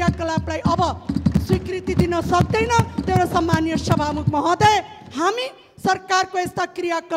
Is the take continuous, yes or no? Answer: yes